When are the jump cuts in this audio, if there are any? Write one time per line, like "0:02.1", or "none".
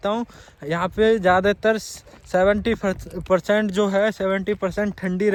none